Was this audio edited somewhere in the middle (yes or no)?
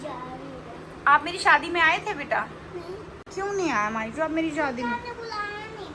no